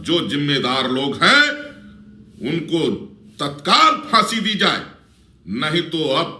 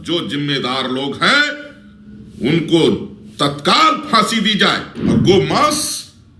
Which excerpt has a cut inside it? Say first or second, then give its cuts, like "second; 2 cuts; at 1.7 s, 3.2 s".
second; 1 cut; at 4.9 s